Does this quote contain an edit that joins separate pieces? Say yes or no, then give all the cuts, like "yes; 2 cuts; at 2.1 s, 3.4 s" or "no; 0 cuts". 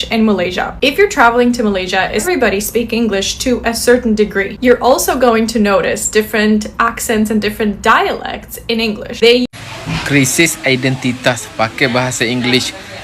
yes; 2 cuts; at 2.2 s, 9.5 s